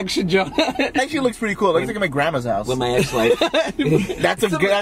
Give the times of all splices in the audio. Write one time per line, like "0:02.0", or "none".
0:01.0